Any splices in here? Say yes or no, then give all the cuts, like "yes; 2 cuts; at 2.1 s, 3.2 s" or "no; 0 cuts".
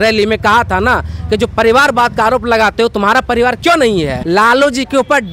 yes; 1 cut; at 4.2 s